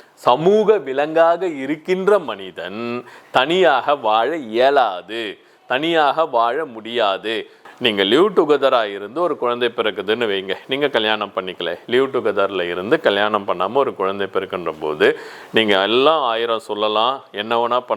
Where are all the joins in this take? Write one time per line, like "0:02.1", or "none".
0:07.6